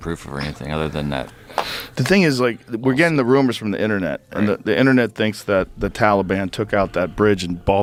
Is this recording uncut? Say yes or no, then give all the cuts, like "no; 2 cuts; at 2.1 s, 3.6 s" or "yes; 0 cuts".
yes; 0 cuts